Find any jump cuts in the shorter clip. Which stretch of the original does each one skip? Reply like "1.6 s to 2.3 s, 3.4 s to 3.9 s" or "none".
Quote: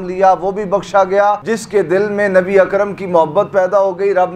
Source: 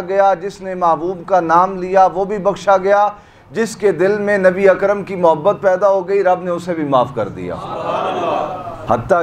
3.3 s to 3.6 s